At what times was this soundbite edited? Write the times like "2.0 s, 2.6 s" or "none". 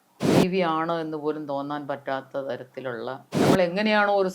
3.3 s